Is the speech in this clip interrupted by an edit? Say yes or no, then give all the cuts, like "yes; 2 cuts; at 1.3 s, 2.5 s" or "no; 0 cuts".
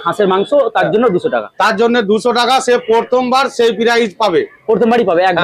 no; 0 cuts